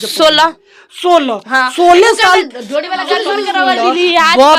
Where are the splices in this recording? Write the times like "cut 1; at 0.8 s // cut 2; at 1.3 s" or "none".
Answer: cut 1; at 3.4 s